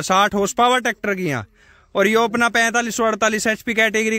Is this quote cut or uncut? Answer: uncut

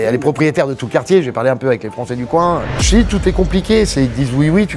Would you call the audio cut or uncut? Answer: cut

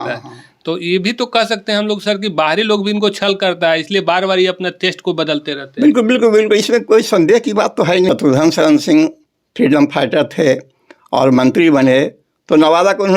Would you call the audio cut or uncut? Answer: cut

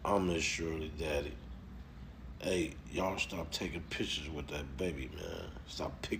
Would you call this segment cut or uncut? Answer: uncut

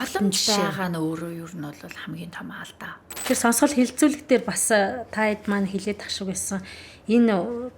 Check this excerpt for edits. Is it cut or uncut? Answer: cut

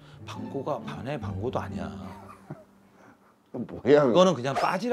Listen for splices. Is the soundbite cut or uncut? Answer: uncut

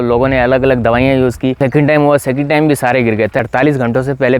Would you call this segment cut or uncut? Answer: cut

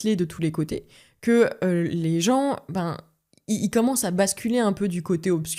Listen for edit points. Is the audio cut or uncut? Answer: uncut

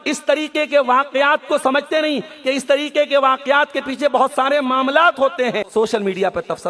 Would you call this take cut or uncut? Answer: uncut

